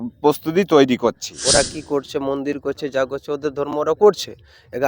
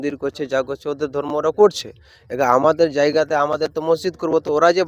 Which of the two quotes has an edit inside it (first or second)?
first